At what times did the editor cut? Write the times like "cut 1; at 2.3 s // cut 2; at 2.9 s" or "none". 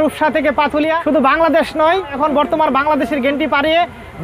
cut 1; at 1.0 s // cut 2; at 2.1 s